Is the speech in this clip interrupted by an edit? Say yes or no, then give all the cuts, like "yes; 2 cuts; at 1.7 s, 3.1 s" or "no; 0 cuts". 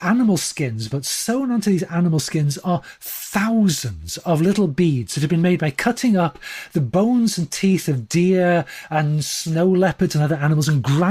no; 0 cuts